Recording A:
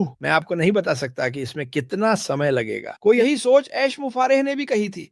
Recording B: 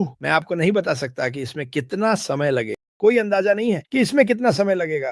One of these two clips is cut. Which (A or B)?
A